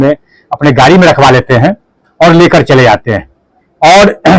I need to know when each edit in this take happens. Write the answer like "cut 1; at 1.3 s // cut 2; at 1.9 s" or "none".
none